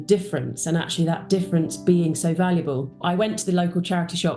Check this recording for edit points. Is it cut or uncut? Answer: cut